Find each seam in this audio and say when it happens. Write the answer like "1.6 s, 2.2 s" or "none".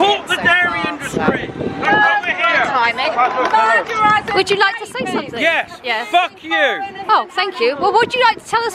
none